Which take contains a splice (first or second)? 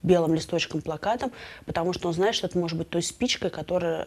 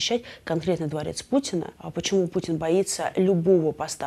second